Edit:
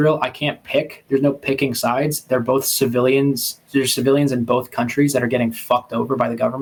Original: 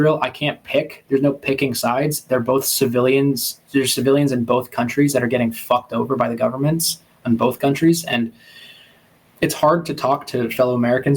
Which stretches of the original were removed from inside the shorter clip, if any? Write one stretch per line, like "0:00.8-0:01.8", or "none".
none